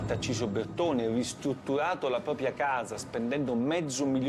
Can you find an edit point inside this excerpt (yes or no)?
no